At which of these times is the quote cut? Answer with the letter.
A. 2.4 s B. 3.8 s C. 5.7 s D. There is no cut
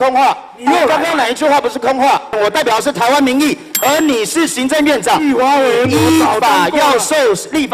A